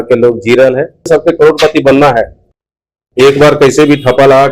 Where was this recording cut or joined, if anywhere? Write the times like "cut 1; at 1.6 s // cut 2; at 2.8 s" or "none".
cut 1; at 1.1 s